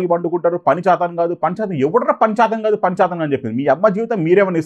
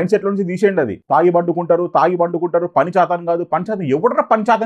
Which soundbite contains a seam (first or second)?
second